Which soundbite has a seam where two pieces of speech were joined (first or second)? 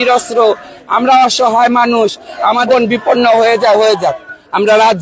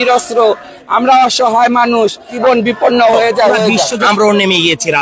second